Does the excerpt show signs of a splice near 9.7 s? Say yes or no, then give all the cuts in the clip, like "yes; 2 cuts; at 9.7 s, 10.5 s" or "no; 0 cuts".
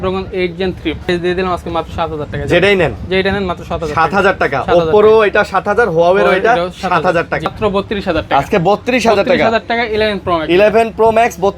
no; 2 cuts; at 1.1 s, 7.5 s